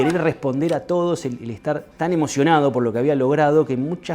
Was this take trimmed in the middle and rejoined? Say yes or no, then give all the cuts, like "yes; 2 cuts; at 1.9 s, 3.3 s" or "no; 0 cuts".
yes; 1 cut; at 1.9 s